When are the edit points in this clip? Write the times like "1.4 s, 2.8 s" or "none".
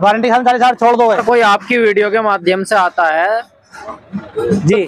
1.2 s